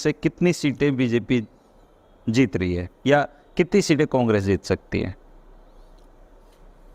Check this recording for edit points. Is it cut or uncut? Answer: uncut